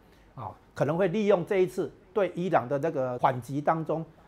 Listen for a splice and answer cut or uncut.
cut